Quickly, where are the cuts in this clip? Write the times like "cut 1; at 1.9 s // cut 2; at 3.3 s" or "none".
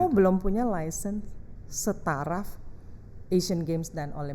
none